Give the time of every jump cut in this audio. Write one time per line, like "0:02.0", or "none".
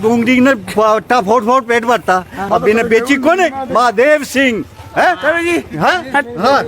0:02.4